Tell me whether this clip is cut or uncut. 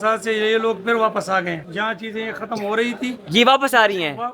cut